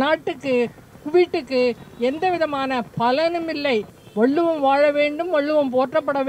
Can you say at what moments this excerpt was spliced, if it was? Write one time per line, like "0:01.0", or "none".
0:04.0